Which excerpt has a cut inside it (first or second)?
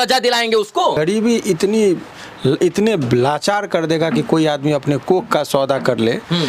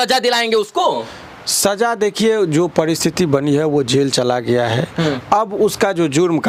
first